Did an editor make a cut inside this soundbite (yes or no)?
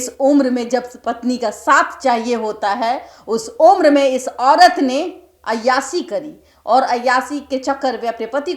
no